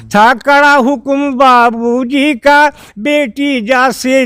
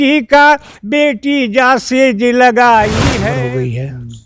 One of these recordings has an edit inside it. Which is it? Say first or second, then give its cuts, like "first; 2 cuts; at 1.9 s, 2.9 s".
second; 1 cut; at 3.1 s